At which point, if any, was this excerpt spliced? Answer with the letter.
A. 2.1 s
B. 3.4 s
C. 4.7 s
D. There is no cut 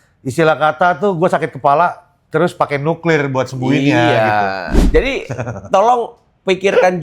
C